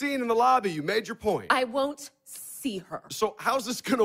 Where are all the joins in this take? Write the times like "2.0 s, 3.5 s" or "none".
none